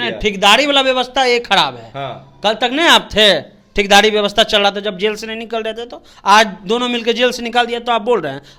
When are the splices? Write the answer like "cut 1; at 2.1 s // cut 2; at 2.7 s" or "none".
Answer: none